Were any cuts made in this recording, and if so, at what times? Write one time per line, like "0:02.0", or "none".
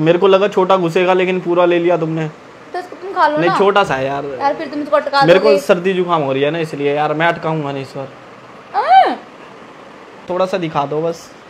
0:10.3